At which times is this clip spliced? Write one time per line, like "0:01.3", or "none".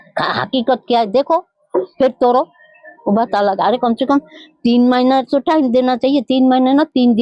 none